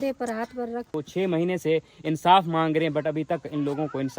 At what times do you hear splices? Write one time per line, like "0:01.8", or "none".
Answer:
0:00.9